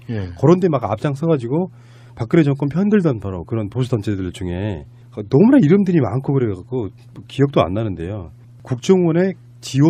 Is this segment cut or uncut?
uncut